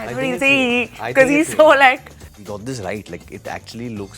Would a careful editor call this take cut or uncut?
cut